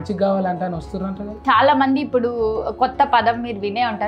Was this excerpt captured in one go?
yes; 0 cuts

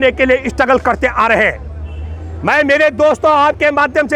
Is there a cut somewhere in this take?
no; 0 cuts

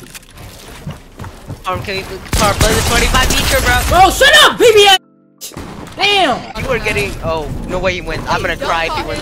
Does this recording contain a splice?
yes; 1 cut; at 6.6 s

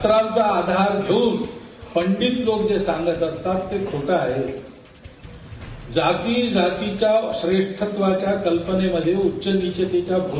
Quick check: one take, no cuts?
yes; 0 cuts

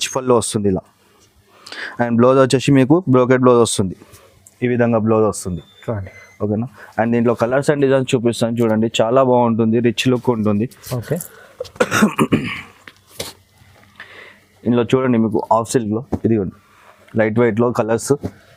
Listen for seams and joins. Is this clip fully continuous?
yes; 0 cuts

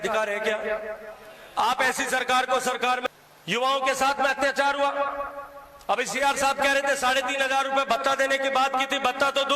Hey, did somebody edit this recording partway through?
yes; 1 cut; at 3.1 s

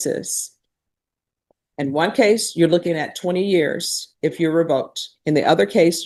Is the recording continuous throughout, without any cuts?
yes; 0 cuts

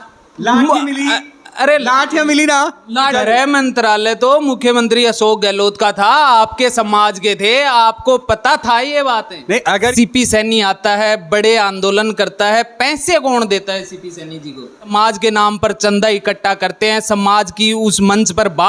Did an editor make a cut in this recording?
yes; 3 cuts; at 3.1 s, 9.9 s, 14.9 s

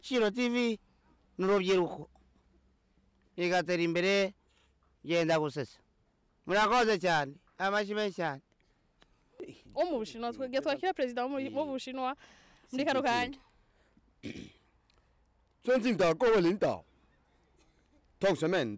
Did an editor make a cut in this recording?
yes; 1 cut; at 9.5 s

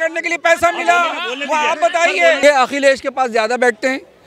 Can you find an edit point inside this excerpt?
yes; 1 cut; at 2.4 s

